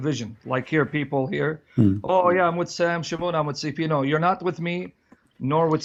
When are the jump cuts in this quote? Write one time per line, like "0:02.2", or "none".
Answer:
none